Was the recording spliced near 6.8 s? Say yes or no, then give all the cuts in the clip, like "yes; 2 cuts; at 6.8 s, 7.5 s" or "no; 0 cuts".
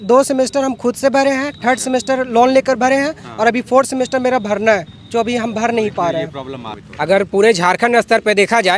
yes; 1 cut; at 6.8 s